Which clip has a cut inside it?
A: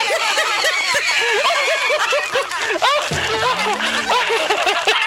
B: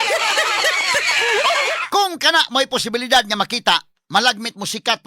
B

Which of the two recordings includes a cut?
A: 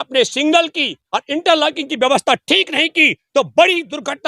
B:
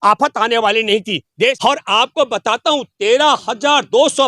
B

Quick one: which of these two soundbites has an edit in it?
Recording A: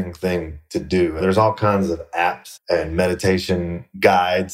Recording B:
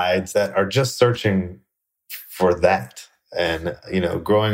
A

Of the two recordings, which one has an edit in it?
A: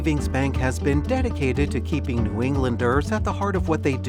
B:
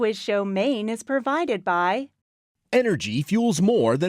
B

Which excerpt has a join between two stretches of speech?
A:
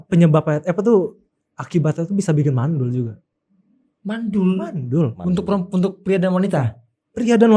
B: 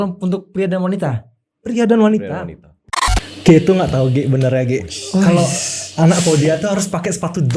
B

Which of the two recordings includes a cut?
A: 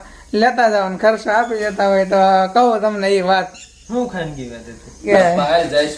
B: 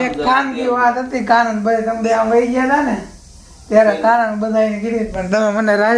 A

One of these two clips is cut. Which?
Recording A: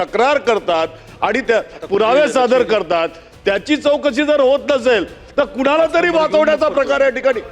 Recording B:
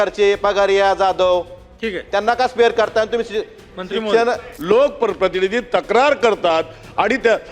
B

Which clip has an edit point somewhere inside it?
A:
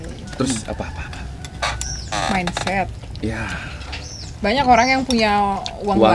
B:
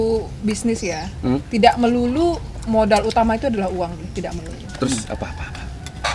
A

